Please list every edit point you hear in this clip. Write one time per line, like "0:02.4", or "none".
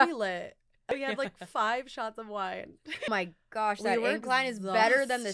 0:00.9
0:03.1